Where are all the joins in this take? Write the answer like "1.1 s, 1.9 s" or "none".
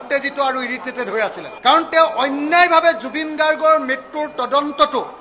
1.5 s